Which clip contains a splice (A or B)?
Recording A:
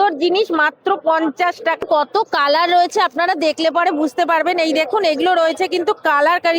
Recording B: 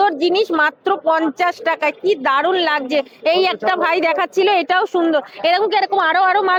A